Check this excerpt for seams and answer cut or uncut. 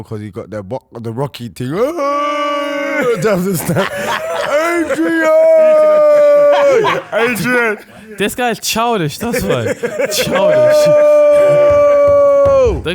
cut